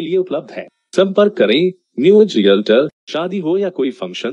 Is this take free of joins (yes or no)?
no